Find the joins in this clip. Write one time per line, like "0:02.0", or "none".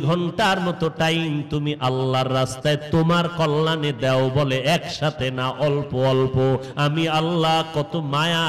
0:06.7